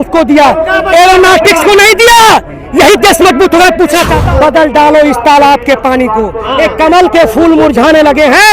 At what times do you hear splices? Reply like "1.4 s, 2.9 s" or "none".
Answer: 4.1 s